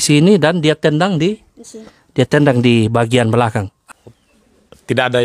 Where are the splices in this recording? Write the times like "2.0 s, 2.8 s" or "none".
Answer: 3.8 s